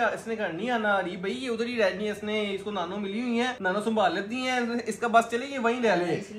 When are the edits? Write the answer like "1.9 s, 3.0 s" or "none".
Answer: none